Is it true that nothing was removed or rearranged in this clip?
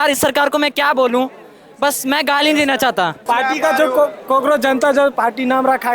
no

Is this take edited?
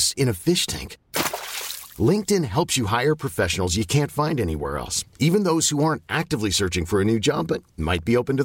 no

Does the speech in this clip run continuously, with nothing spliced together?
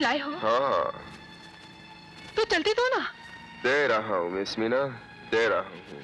yes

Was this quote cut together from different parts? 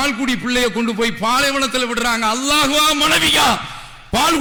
no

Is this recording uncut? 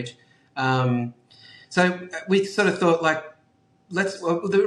yes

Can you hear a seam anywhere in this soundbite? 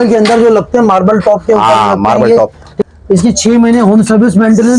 yes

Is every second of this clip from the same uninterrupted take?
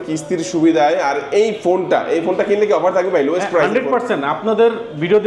yes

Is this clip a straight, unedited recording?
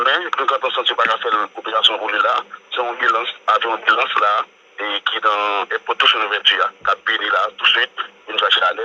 yes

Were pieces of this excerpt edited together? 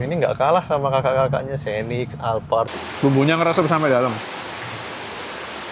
yes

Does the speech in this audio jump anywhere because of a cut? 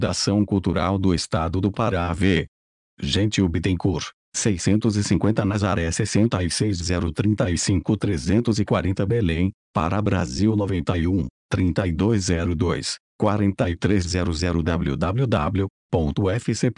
yes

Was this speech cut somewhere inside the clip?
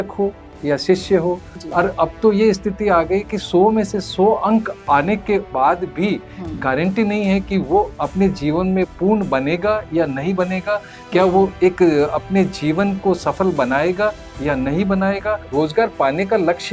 yes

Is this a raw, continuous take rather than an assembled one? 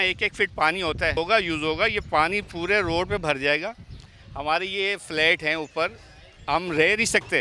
no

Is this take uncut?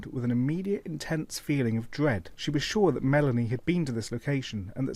no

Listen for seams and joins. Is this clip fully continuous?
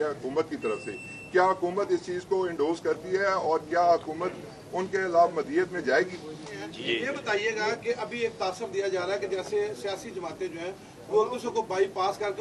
no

